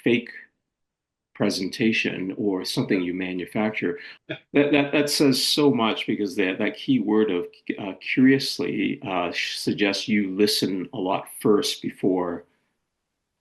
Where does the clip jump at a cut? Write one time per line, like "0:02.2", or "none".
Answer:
0:04.1